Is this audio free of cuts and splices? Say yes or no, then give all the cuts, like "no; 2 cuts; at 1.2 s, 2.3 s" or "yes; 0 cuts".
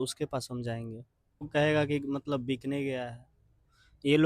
no; 1 cut; at 1.5 s